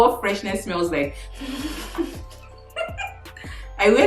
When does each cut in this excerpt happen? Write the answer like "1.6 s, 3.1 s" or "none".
1.2 s

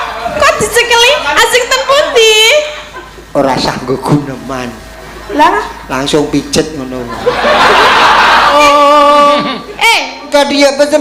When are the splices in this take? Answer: 8.5 s

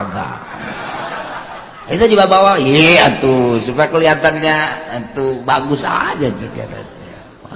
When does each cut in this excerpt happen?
none

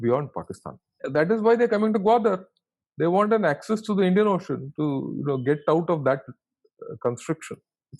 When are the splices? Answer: 1.0 s

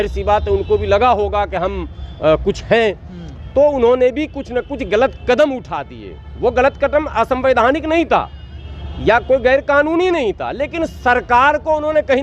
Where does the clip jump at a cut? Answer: none

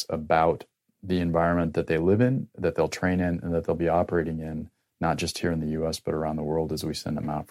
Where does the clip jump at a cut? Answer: none

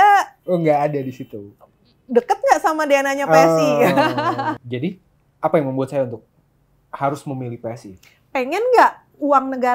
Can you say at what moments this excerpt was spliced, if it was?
4.5 s

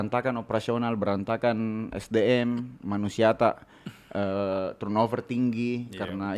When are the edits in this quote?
none

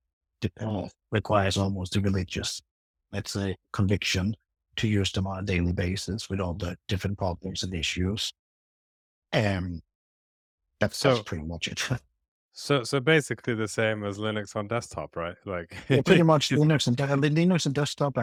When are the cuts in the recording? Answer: none

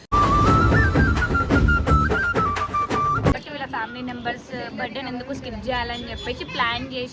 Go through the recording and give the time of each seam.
3.3 s

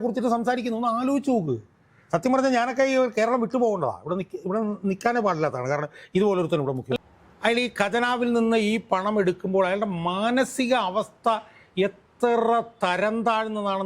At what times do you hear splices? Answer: 7.0 s

